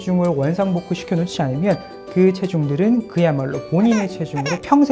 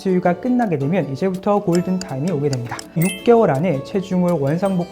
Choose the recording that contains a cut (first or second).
second